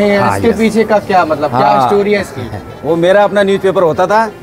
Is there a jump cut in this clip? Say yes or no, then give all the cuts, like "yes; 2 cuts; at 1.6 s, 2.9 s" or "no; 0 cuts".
no; 0 cuts